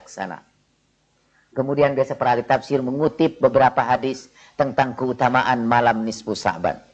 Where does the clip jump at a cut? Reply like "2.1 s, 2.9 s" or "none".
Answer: none